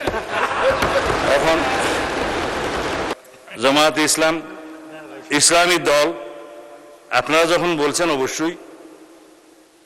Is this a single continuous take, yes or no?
no